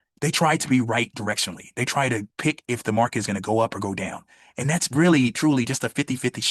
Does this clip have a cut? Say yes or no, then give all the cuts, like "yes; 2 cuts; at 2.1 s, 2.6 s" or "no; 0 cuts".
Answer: no; 0 cuts